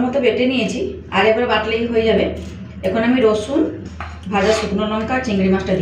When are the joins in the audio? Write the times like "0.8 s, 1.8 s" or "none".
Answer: none